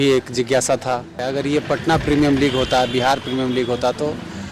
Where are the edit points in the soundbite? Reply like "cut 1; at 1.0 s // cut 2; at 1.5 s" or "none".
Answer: cut 1; at 1.2 s